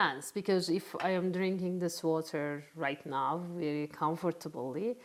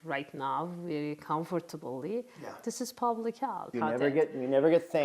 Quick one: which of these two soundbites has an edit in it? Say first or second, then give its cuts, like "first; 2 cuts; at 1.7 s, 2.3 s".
second; 1 cut; at 3.6 s